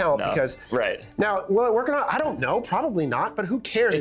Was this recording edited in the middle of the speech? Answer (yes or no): no